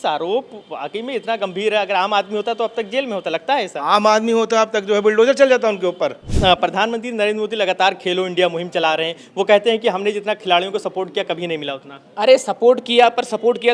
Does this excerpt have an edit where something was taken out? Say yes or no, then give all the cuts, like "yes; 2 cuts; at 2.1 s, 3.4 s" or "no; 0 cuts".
yes; 1 cut; at 6.2 s